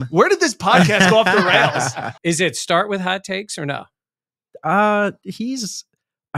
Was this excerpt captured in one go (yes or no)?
no